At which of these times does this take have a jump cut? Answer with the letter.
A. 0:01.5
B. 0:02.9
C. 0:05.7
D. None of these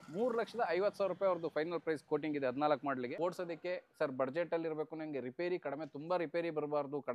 B